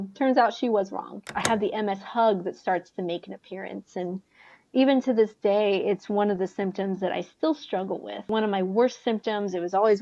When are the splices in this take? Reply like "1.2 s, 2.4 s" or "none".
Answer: 1.2 s